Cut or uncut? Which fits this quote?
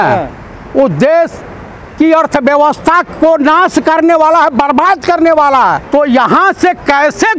cut